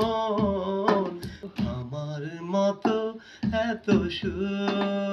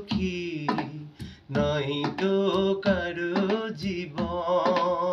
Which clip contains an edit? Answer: first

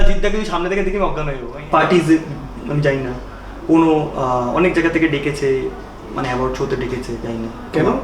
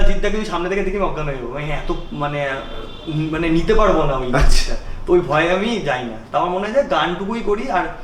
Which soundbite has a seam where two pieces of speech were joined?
first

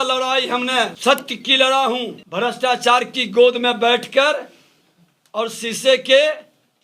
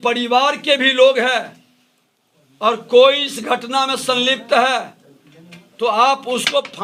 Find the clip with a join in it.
first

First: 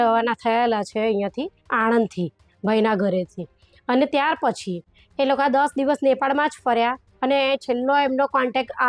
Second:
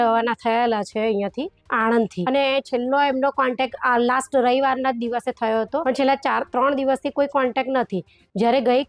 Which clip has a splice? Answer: second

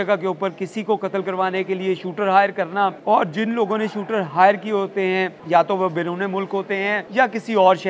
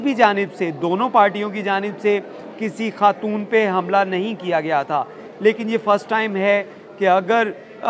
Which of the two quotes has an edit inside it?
first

